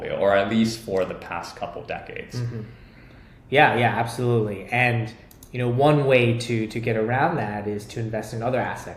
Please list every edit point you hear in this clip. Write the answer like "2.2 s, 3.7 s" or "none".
none